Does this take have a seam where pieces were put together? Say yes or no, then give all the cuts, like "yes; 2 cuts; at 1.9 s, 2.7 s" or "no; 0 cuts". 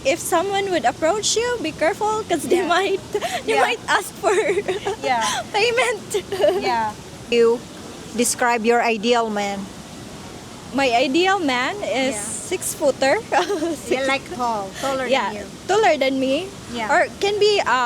yes; 1 cut; at 7.3 s